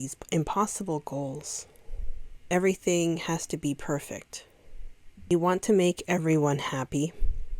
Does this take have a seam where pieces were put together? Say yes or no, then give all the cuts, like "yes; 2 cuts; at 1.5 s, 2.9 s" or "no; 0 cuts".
no; 0 cuts